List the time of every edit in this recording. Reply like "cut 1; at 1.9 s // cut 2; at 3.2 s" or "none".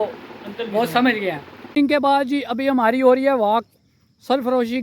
cut 1; at 1.5 s